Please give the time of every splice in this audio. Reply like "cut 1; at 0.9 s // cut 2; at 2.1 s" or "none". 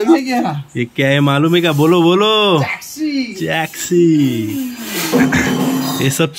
none